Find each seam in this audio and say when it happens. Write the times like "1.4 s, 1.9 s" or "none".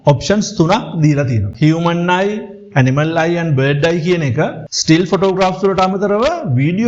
1.5 s